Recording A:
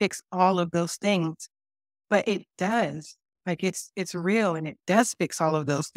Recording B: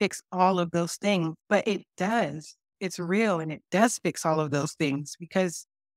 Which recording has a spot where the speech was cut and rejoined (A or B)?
B